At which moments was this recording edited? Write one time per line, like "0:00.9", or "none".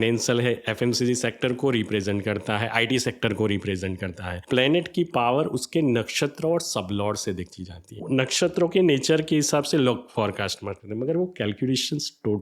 0:04.4
0:08.0